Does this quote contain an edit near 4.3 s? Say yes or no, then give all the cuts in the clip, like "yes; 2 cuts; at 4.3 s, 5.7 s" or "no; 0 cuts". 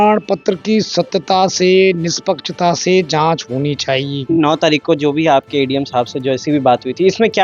yes; 1 cut; at 4.3 s